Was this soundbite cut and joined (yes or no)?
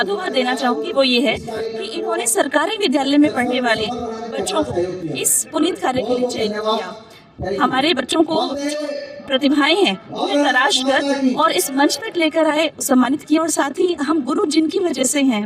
no